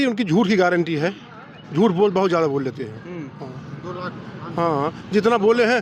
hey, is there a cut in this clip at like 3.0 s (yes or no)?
no